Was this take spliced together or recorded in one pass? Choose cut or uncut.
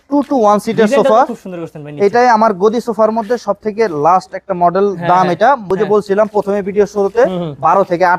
uncut